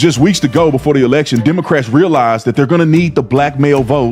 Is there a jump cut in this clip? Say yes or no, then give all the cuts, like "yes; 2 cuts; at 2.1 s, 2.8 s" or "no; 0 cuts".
no; 0 cuts